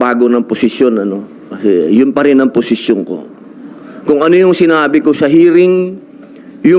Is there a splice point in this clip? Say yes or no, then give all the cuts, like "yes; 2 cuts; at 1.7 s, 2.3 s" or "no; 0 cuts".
no; 0 cuts